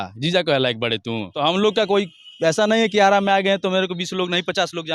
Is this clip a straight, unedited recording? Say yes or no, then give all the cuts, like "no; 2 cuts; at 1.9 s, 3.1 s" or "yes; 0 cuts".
no; 1 cut; at 1.2 s